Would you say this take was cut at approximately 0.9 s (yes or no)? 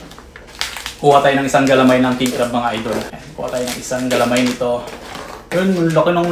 no